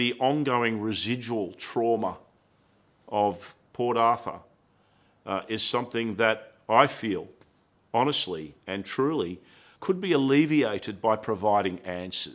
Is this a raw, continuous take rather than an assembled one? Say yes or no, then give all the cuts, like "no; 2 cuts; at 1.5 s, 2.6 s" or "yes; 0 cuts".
yes; 0 cuts